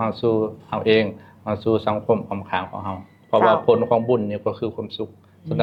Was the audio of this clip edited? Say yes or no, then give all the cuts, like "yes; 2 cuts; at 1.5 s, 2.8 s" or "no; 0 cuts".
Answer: no; 0 cuts